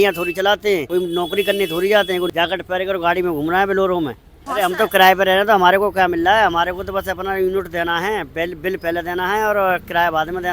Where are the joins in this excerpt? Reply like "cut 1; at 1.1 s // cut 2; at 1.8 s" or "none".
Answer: cut 1; at 0.9 s // cut 2; at 2.3 s // cut 3; at 4.4 s